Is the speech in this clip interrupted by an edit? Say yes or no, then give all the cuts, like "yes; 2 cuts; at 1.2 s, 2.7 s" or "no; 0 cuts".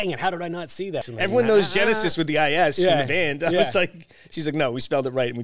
yes; 1 cut; at 1.0 s